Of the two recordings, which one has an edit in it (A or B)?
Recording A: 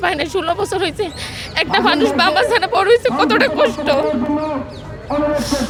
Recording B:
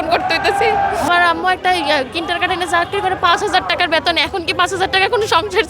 B